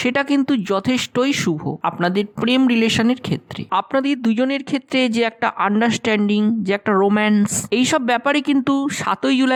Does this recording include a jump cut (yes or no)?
no